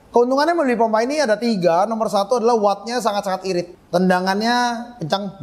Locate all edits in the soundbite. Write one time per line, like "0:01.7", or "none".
none